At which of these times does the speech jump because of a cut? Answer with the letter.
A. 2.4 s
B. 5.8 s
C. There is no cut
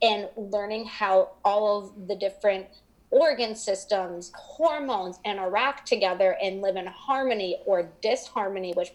C